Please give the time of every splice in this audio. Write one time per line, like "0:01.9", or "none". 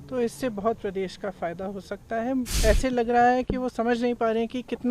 0:02.5